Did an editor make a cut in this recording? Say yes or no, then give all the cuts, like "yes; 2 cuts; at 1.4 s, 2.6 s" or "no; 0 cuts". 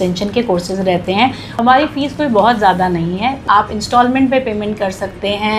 yes; 2 cuts; at 1.5 s, 3.4 s